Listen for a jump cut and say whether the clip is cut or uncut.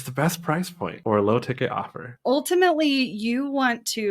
cut